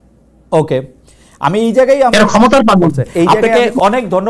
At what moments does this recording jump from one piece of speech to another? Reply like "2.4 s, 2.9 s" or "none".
3.3 s